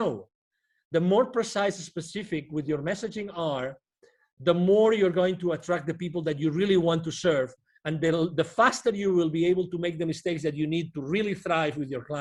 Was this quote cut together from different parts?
no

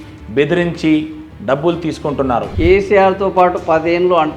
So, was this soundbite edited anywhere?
yes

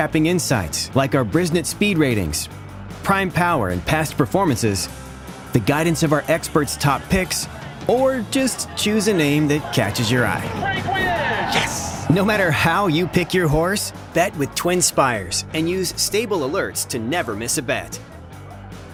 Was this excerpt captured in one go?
yes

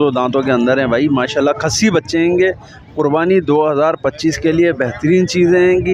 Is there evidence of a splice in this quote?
no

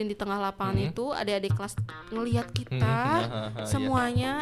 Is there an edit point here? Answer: no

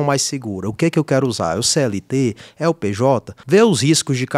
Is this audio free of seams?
no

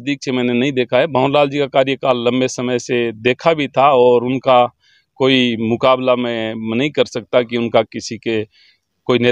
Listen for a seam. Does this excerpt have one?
no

